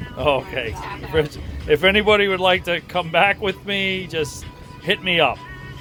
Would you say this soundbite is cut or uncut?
uncut